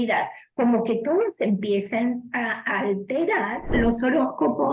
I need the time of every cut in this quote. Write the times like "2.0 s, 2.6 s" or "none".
3.7 s